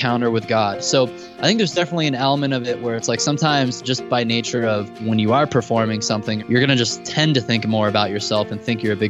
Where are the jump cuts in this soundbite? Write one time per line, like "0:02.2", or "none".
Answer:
0:05.0
0:06.4
0:07.1